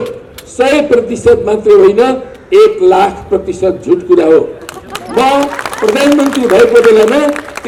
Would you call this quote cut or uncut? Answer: uncut